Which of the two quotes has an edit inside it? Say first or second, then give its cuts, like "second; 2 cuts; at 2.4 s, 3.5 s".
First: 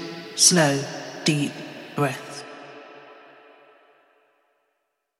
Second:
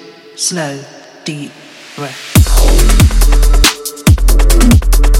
second; 1 cut; at 2.3 s